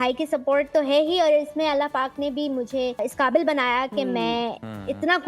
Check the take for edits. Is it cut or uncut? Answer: cut